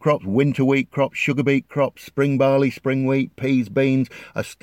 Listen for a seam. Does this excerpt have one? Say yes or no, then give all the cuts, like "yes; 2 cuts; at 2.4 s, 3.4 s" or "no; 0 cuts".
no; 0 cuts